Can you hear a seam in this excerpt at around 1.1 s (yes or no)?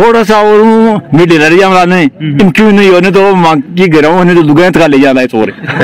no